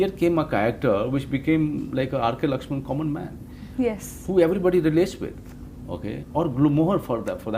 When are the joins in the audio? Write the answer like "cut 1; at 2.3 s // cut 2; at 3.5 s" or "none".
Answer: none